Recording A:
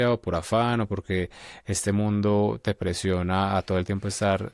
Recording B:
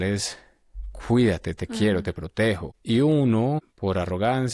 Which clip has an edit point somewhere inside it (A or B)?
B